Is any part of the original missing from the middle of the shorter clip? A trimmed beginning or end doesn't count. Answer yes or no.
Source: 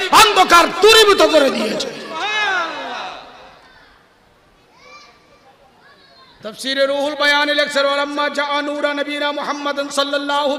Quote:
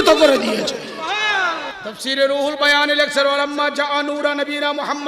yes